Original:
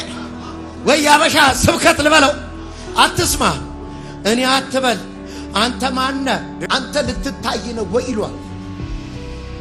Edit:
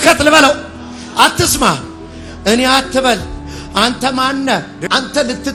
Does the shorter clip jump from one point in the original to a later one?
no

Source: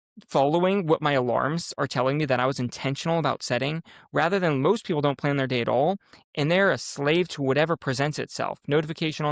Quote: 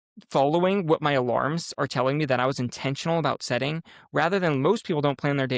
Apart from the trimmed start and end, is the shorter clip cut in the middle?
no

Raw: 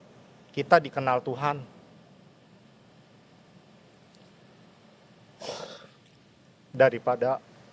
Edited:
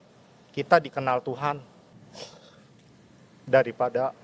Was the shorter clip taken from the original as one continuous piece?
no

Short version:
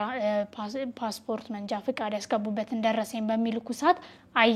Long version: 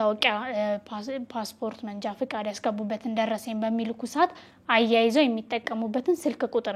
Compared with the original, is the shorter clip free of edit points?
yes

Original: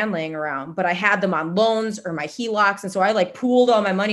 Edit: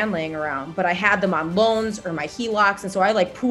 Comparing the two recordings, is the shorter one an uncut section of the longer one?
yes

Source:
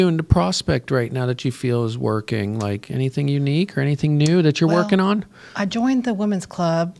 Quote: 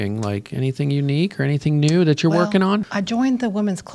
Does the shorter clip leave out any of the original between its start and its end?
yes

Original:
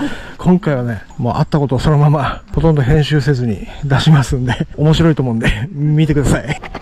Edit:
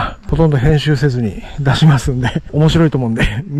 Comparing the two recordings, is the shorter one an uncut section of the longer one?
yes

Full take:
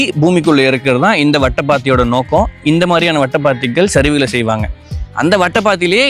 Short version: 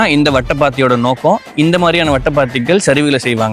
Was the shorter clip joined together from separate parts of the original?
no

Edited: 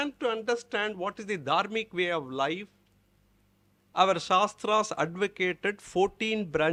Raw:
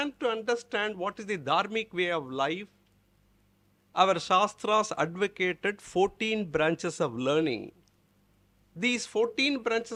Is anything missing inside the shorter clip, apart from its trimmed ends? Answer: no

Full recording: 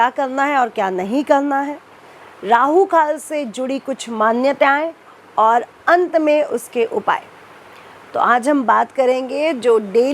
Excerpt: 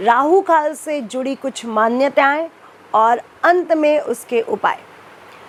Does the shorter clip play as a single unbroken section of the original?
yes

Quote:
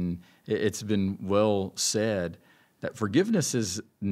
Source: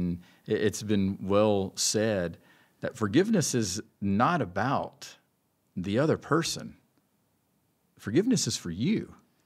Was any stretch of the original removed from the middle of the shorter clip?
no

